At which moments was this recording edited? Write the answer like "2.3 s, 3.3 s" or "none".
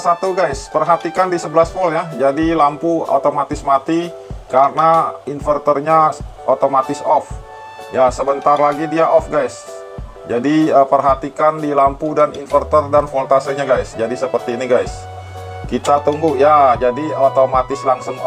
none